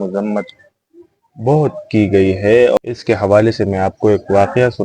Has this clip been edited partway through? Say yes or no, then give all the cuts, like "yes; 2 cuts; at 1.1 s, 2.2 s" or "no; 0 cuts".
yes; 1 cut; at 2.8 s